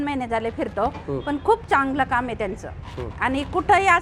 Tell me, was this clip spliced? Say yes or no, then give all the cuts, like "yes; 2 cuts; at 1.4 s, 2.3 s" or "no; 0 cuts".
no; 0 cuts